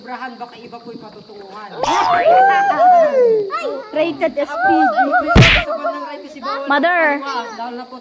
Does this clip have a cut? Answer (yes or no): no